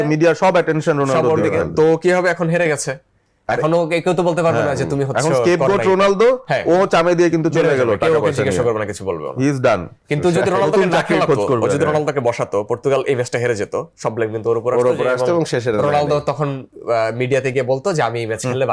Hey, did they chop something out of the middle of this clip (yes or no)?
no